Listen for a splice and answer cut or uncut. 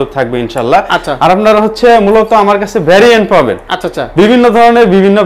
uncut